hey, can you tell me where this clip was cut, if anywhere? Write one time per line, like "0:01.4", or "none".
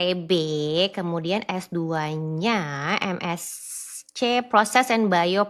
none